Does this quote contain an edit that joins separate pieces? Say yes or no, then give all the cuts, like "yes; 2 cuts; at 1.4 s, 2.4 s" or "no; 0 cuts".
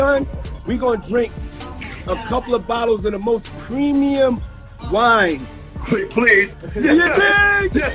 no; 0 cuts